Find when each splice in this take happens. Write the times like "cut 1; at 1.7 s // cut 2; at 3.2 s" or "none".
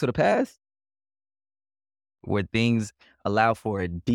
none